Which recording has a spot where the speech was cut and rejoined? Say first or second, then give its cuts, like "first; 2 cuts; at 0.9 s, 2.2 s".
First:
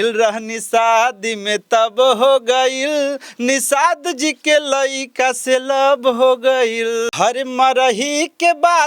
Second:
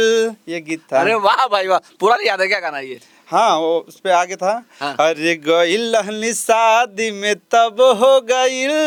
first; 1 cut; at 7.1 s